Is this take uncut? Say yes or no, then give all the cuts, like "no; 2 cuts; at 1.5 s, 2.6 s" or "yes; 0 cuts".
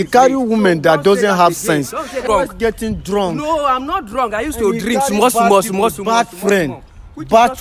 no; 1 cut; at 2.2 s